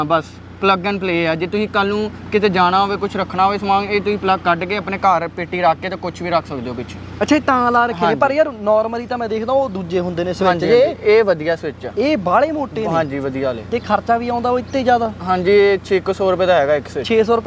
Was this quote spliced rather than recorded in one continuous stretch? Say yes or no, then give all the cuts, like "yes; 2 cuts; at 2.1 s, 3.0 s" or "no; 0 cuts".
no; 0 cuts